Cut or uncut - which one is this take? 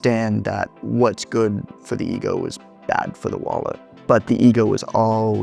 cut